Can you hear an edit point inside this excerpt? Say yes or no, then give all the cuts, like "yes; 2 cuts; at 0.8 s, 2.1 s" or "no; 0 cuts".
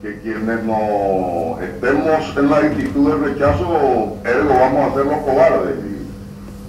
no; 0 cuts